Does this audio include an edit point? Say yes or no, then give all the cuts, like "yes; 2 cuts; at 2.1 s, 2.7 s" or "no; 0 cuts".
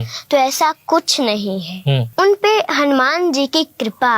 yes; 1 cut; at 2.1 s